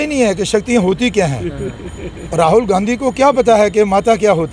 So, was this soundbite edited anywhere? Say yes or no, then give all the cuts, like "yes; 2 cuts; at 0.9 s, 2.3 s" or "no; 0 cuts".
no; 0 cuts